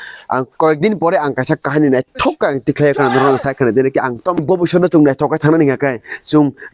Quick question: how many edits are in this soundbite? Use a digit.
1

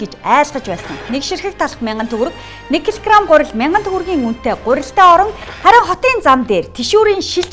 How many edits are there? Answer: 2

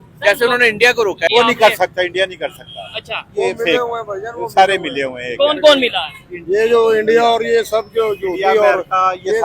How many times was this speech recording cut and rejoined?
1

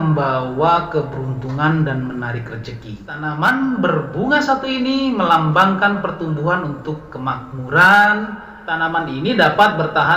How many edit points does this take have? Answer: 1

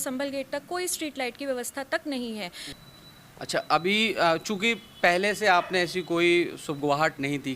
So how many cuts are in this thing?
1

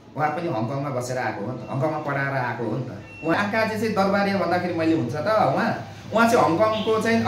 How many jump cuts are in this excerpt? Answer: 1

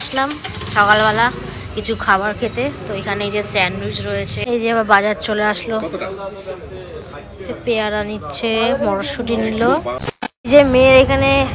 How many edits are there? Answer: 2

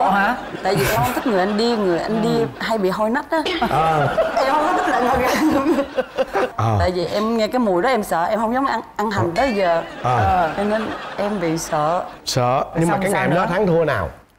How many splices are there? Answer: 0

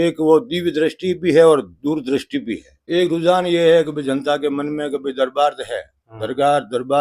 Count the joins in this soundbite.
1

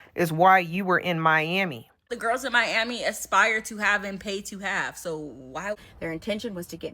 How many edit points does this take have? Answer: 2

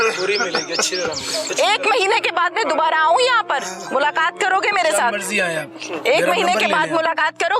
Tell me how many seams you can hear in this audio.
1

